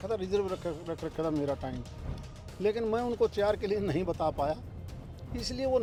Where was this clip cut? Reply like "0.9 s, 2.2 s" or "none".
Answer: none